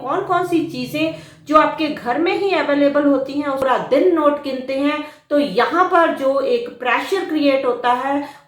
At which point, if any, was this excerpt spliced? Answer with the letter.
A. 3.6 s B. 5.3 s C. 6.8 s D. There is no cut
A